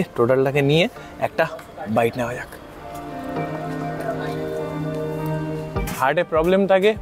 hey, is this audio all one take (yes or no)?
no